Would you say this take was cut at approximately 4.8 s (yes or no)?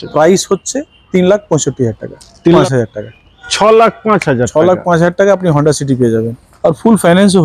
no